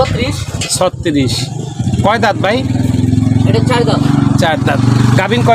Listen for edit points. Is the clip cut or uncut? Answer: uncut